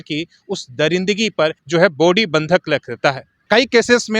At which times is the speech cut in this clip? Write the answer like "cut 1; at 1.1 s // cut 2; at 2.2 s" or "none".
cut 1; at 1.6 s // cut 2; at 3.3 s